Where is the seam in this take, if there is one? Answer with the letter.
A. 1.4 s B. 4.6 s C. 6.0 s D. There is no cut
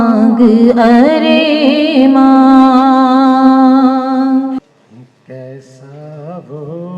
B